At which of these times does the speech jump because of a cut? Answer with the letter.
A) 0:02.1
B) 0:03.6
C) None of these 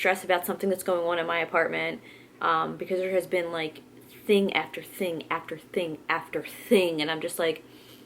C